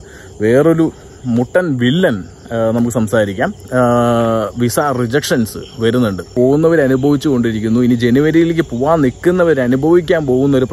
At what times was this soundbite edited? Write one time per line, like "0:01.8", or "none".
0:03.6
0:06.3